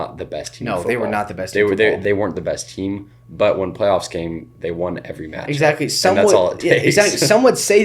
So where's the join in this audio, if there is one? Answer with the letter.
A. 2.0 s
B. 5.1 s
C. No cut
A